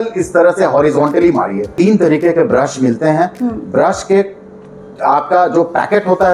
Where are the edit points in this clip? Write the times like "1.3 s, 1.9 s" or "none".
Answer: 1.7 s